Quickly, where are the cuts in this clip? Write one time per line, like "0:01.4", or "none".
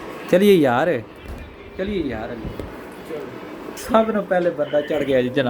0:03.8